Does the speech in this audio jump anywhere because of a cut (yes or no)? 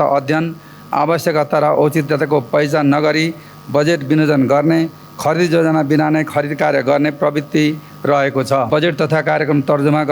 yes